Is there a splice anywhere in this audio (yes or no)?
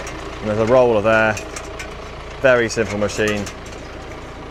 no